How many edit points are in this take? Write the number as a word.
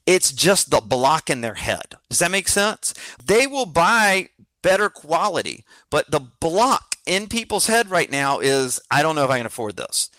one